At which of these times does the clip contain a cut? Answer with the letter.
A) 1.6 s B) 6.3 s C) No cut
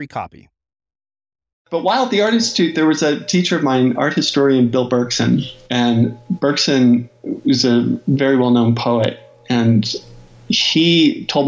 A